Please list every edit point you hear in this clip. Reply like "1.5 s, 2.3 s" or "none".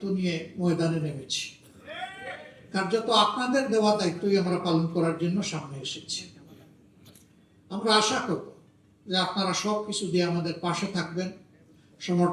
none